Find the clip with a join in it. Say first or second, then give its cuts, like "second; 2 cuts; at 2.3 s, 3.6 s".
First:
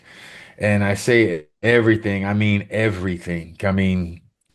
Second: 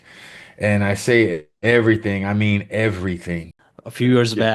second; 1 cut; at 3.5 s